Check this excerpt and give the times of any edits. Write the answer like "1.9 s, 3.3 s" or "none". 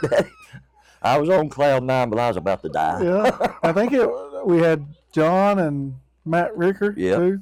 none

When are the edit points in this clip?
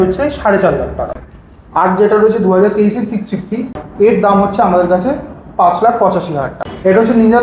1.1 s, 3.8 s, 6.5 s

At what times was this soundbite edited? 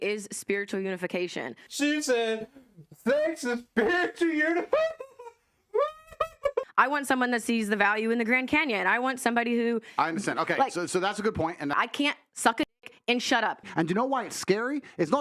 1.6 s, 6.7 s, 11.8 s, 13.6 s

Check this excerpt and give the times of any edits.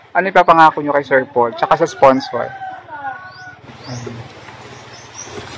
3.5 s

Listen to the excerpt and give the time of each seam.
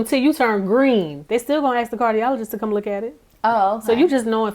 1.2 s

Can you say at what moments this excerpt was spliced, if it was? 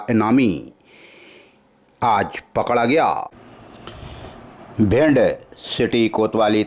3.3 s

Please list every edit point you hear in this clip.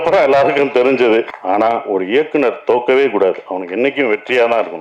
1.3 s

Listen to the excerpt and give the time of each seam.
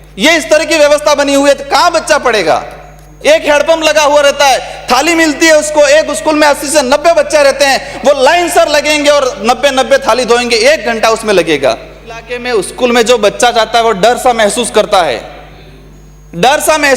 12.4 s

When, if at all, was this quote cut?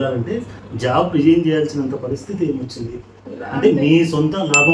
none

